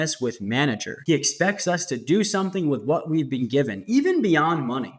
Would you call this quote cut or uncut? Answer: cut